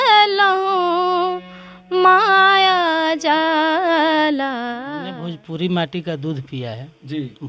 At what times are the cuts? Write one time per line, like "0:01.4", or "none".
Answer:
0:04.9